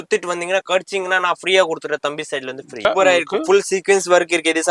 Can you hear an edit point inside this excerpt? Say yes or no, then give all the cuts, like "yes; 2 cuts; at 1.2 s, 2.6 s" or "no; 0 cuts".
yes; 1 cut; at 2.9 s